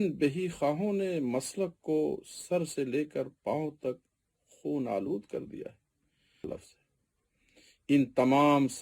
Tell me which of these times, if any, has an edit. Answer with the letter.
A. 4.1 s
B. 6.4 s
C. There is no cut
B